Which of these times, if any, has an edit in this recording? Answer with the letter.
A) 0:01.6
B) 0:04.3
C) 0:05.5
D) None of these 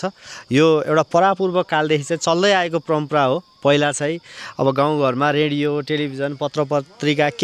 D